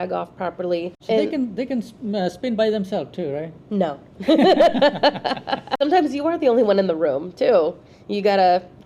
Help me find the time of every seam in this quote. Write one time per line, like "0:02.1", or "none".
0:00.9
0:05.8